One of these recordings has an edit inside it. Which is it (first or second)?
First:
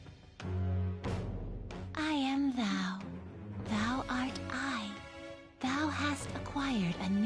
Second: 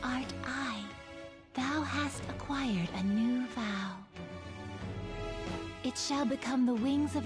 first